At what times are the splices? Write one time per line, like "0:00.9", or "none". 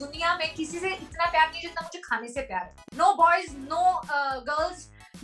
0:02.8